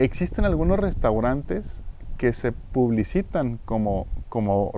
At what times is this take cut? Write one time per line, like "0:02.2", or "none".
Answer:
none